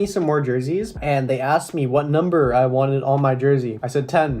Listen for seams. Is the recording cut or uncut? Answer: cut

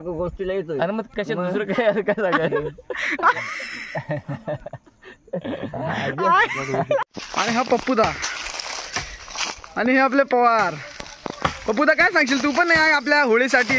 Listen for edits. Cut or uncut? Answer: cut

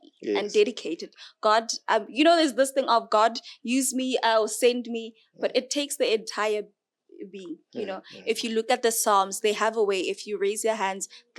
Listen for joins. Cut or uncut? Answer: uncut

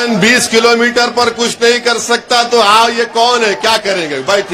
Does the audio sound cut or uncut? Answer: uncut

